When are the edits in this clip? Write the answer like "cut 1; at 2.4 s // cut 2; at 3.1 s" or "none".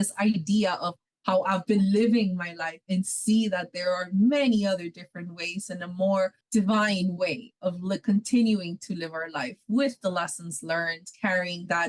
cut 1; at 1.0 s // cut 2; at 6.4 s